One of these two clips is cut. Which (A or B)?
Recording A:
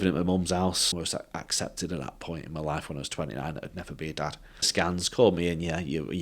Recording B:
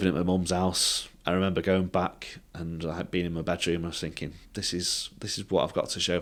A